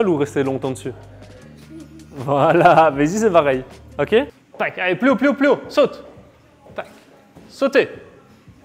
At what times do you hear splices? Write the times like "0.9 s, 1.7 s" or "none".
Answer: none